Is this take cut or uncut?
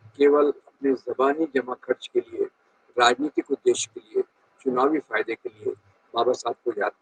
uncut